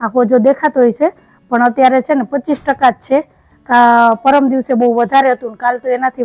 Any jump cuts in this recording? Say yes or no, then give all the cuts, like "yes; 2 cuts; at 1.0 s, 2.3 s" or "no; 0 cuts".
no; 0 cuts